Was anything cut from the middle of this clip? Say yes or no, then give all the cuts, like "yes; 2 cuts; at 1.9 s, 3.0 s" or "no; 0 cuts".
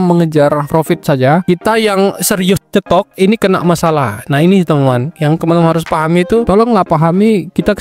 no; 0 cuts